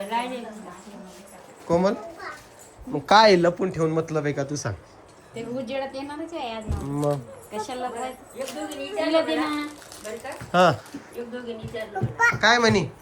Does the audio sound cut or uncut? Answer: cut